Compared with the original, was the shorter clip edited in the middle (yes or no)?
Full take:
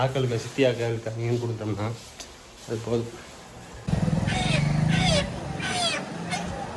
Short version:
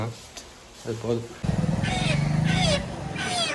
yes